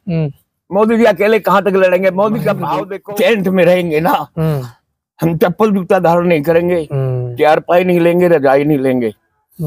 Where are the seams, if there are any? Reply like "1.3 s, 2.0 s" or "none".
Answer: 2.9 s